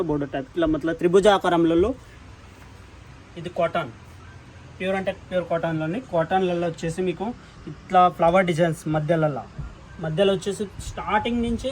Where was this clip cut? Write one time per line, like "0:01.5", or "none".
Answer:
0:02.1